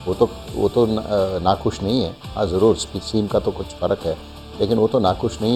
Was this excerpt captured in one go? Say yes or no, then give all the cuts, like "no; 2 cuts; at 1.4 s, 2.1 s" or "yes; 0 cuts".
yes; 0 cuts